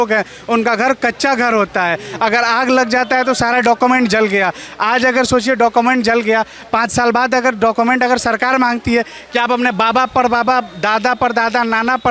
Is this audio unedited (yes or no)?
yes